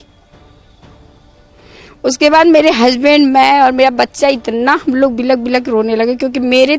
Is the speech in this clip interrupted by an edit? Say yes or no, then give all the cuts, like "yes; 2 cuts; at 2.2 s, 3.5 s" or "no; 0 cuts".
no; 0 cuts